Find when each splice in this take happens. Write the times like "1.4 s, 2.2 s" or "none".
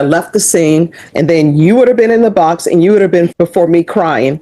1.0 s, 3.3 s